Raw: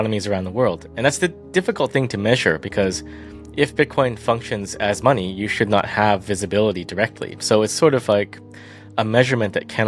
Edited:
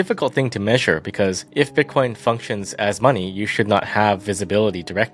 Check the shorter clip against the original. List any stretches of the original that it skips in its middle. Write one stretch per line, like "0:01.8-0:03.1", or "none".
0:03.0-0:03.4

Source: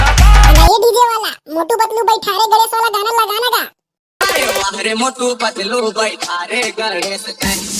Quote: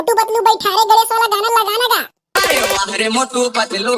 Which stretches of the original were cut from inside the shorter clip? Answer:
0:03.8-0:04.0

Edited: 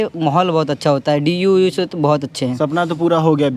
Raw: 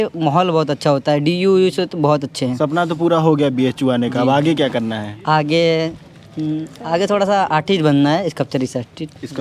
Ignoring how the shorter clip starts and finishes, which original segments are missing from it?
none

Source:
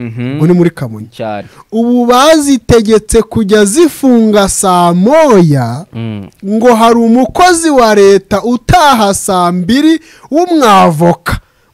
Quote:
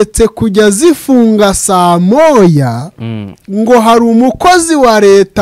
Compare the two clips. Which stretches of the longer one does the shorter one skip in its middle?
none

